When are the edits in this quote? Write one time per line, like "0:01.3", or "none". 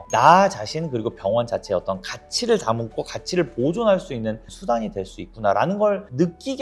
none